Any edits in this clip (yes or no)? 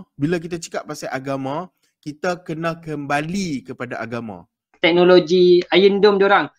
yes